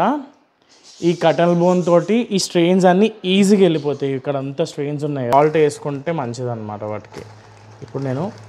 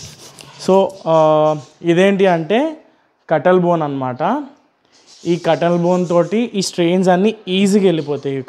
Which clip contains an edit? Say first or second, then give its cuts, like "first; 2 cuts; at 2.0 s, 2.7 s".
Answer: first; 1 cut; at 5.3 s